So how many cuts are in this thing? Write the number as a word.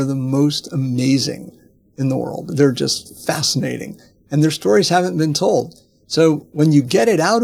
zero